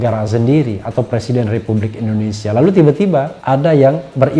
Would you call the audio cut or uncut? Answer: cut